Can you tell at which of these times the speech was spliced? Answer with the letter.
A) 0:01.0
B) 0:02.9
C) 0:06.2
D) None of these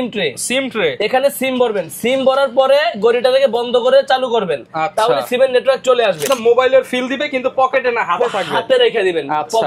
C